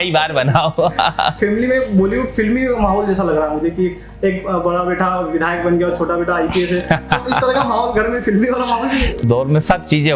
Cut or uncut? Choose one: cut